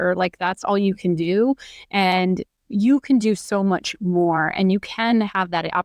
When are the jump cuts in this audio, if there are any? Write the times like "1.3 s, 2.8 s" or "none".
2.5 s

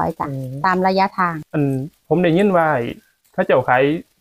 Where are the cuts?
1.4 s

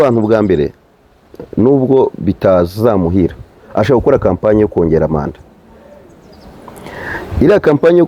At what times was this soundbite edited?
none

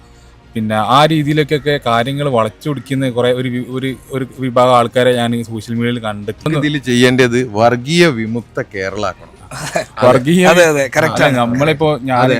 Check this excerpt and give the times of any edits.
6.5 s

